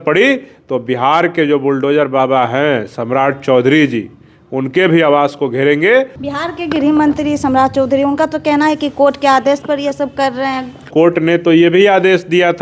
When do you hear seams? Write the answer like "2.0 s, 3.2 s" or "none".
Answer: 6.2 s, 10.9 s